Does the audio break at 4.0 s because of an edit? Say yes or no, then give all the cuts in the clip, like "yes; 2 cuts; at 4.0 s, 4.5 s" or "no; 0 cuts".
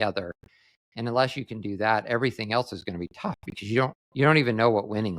yes; 1 cut; at 4.0 s